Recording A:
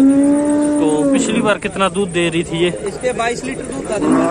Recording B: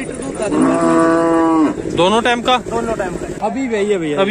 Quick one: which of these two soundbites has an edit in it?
B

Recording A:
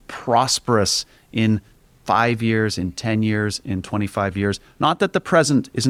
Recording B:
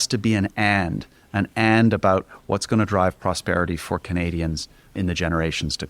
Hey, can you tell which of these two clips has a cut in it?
B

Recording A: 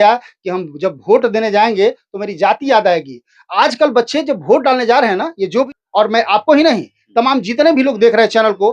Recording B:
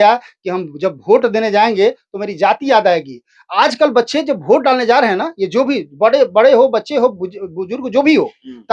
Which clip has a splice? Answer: A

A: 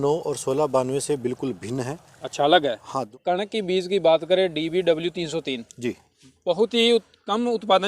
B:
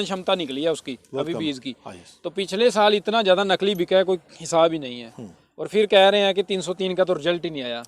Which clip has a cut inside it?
A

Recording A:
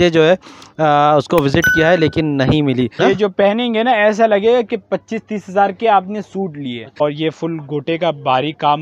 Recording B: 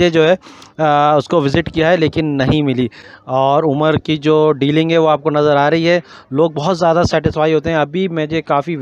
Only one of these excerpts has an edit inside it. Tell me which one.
A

